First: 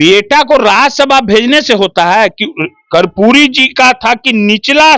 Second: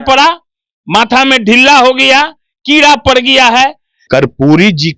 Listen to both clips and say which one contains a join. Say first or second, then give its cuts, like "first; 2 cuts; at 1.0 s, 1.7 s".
second; 1 cut; at 4.1 s